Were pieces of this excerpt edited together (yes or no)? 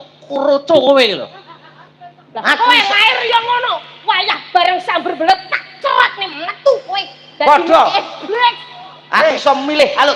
no